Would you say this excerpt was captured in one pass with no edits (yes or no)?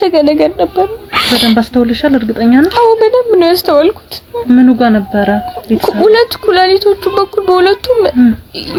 yes